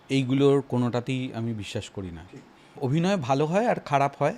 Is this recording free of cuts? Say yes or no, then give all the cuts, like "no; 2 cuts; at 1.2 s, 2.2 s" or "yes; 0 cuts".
no; 1 cut; at 2.6 s